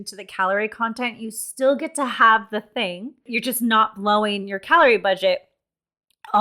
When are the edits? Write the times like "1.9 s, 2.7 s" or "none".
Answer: 3.3 s